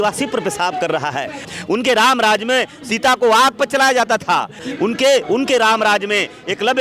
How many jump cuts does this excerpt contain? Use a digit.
1